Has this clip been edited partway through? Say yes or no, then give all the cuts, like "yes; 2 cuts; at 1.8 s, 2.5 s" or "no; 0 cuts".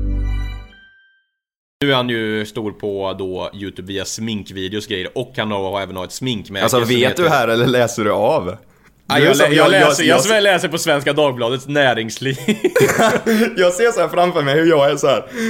yes; 1 cut; at 1.6 s